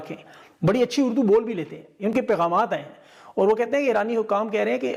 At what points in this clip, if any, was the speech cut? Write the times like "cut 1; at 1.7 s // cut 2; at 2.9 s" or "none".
none